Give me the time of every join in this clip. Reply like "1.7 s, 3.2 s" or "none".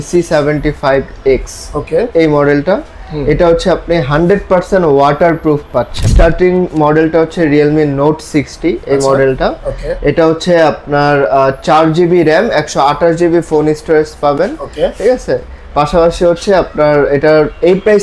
6.1 s